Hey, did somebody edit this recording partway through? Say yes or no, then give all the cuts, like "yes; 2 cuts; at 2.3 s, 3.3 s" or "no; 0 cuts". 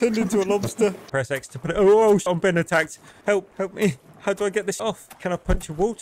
yes; 3 cuts; at 1.0 s, 2.3 s, 4.8 s